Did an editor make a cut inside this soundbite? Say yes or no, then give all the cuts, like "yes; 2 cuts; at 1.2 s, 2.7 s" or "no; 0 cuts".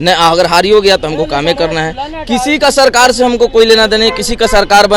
no; 0 cuts